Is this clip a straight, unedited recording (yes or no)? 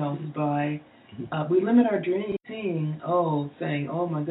no